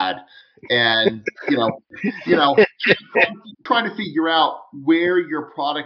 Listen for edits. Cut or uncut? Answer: cut